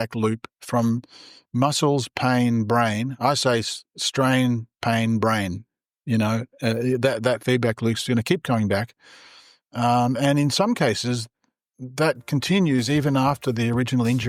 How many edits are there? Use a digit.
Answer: 0